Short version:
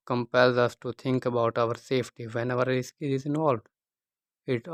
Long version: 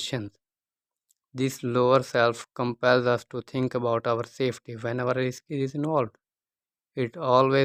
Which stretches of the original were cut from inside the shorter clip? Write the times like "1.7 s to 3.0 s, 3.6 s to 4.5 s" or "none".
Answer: none